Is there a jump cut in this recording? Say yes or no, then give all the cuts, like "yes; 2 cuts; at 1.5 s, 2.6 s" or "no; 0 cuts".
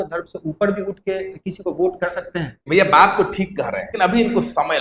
yes; 2 cuts; at 2.6 s, 3.8 s